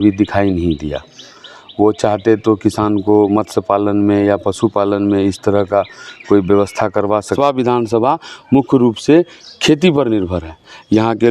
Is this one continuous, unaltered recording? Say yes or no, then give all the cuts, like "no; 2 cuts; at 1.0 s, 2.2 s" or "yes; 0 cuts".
no; 1 cut; at 7.3 s